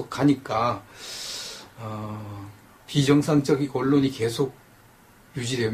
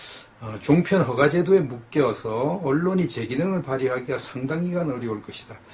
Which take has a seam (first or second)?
first